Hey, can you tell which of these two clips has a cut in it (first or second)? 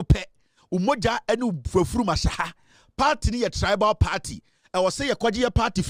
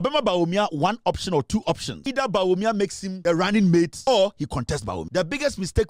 second